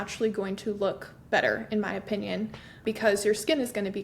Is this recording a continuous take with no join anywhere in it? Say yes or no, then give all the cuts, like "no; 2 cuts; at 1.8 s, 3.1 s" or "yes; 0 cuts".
no; 1 cut; at 2.8 s